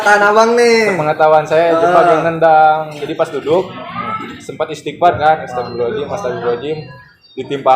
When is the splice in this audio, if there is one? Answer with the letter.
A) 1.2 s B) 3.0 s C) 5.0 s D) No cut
B